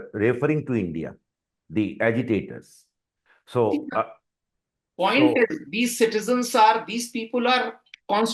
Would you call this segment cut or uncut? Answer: uncut